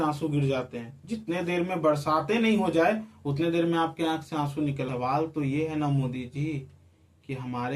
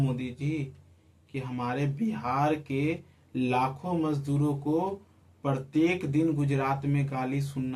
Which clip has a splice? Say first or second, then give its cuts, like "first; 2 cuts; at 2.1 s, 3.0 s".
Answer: first; 1 cut; at 4.9 s